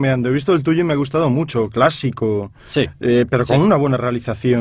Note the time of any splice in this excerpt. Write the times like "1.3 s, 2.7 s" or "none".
0.9 s